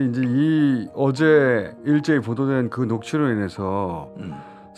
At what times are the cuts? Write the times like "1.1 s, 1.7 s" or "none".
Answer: none